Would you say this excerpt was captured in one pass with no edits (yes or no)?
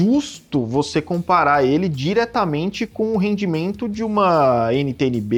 yes